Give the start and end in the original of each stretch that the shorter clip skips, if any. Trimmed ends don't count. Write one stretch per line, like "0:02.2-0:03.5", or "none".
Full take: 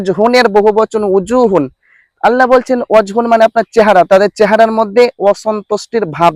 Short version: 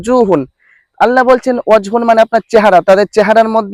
none